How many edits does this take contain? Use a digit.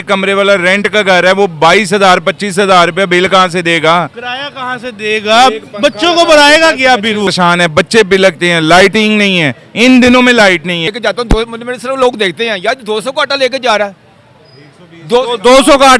2